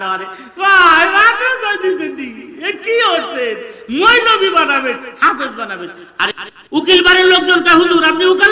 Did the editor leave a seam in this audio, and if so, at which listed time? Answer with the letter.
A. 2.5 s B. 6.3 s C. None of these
B